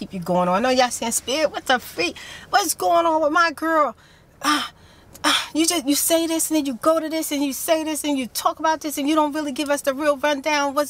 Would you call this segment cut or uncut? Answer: uncut